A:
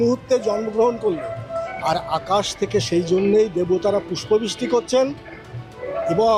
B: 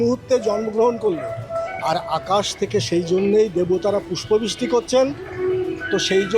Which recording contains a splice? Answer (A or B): B